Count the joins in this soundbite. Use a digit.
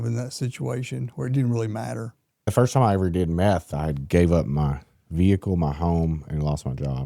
2